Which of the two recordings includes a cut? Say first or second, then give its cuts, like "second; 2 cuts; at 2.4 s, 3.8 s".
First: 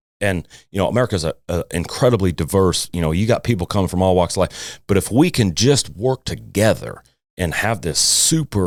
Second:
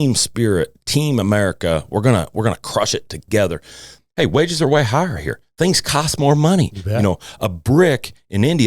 second; 1 cut; at 4.0 s